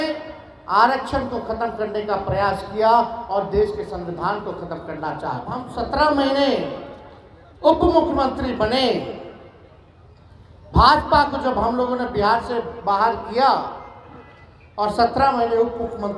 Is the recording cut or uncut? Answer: cut